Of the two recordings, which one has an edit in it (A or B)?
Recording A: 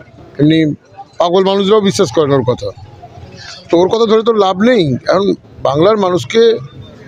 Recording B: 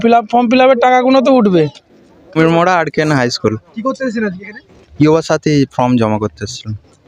B